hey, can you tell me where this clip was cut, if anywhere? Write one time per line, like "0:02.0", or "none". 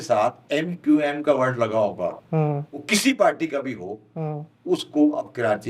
none